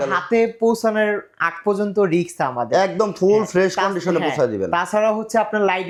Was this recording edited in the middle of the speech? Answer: no; 0 cuts

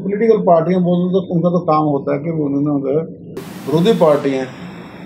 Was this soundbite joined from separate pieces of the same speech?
yes; 1 cut; at 3.4 s

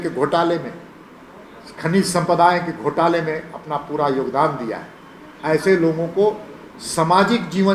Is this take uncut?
yes; 0 cuts

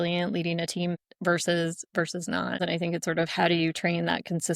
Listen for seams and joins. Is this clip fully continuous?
no; 2 cuts; at 1.0 s, 2.6 s

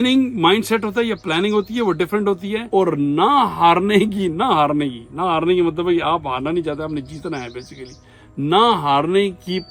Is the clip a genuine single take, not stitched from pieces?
yes; 0 cuts

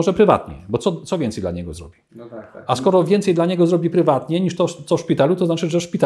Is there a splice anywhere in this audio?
no; 0 cuts

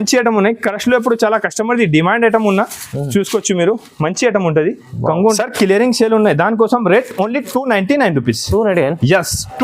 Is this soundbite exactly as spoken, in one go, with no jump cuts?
no; 1 cut; at 5.4 s

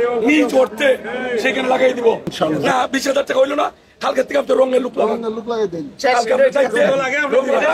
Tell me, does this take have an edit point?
yes; 1 cut; at 2.3 s

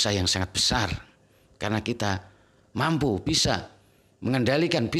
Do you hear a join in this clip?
no; 0 cuts

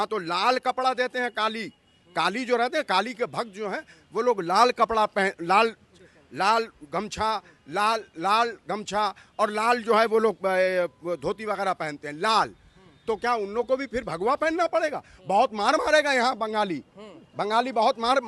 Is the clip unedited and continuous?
yes; 0 cuts

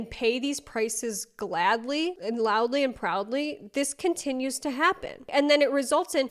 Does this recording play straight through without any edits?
yes; 0 cuts

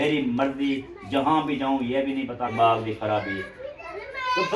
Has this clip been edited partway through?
yes; 1 cut; at 2.5 s

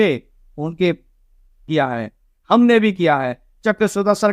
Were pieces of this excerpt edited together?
yes; 1 cut; at 1.7 s

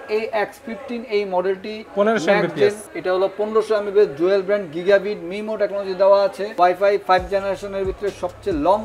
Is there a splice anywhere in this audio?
yes; 2 cuts; at 2.9 s, 6.4 s

